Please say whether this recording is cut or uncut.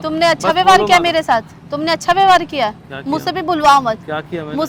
uncut